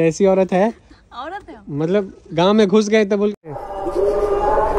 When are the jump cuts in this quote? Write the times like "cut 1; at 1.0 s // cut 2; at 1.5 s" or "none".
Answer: cut 1; at 3.4 s